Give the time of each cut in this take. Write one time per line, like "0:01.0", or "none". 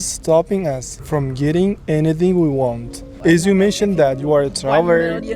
none